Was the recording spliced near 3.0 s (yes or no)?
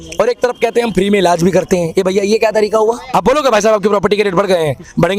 yes